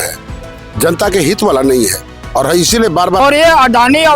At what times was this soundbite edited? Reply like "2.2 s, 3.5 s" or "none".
3.2 s